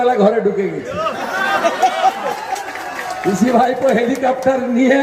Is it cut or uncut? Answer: uncut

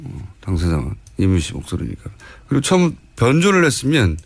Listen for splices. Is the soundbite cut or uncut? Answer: uncut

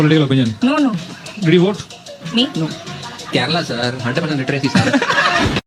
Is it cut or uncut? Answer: uncut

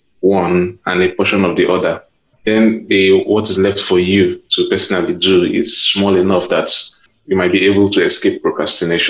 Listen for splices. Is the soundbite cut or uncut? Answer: uncut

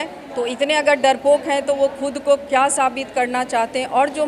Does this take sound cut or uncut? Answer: uncut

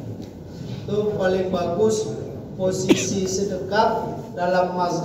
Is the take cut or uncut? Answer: uncut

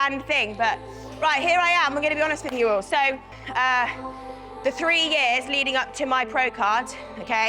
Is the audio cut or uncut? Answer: cut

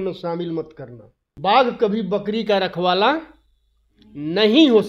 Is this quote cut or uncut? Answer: cut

